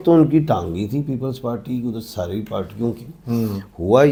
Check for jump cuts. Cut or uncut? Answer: uncut